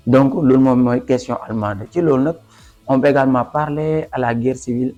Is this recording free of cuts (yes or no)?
yes